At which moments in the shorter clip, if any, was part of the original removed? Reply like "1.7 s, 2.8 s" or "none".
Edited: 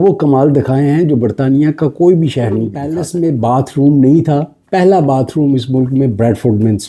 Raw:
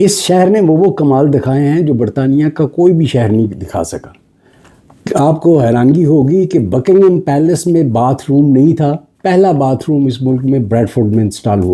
2.9 s